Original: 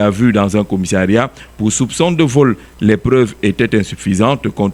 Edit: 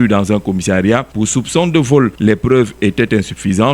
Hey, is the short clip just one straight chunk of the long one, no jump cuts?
no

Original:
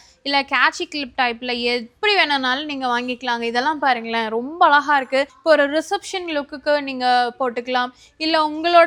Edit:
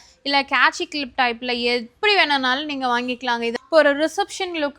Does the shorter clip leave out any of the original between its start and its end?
yes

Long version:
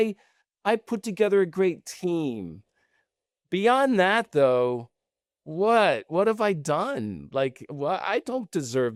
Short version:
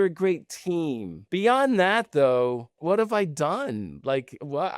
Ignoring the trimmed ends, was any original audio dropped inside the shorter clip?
yes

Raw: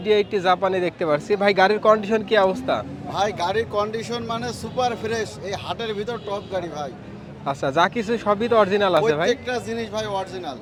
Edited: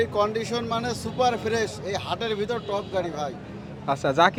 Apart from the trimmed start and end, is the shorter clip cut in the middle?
no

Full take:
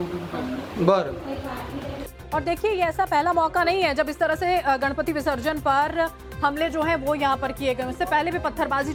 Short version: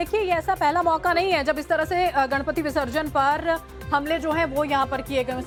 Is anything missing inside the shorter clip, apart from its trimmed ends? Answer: no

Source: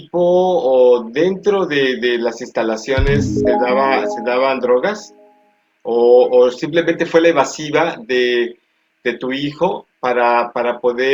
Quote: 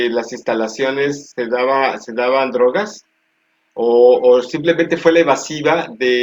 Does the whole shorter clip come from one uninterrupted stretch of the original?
yes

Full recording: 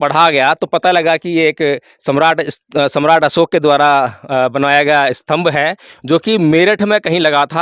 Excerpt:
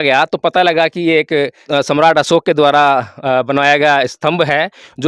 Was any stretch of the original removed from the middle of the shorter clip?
yes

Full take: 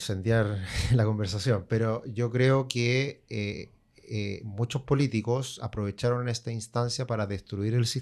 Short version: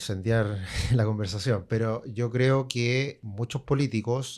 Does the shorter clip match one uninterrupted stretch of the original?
no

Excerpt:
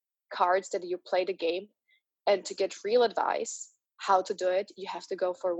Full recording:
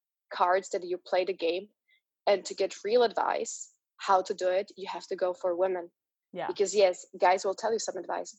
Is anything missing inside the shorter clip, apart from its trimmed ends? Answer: no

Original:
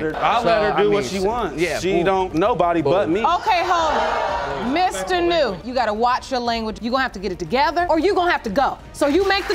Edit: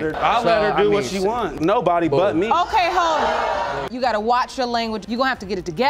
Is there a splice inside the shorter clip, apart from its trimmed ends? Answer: yes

